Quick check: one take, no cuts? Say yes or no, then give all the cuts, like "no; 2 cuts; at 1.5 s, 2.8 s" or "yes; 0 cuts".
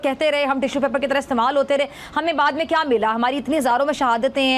yes; 0 cuts